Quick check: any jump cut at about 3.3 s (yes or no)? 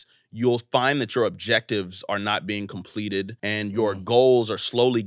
yes